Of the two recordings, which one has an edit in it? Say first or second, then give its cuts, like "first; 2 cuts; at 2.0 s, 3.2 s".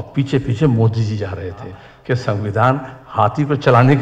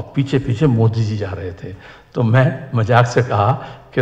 first; 1 cut; at 1.9 s